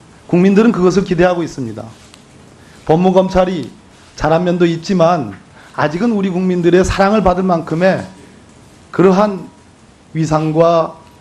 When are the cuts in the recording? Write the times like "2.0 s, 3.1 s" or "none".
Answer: 1.7 s